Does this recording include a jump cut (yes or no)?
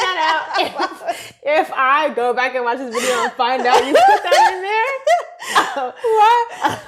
no